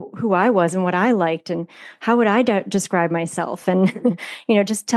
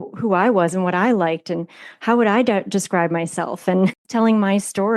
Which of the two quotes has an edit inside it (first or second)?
second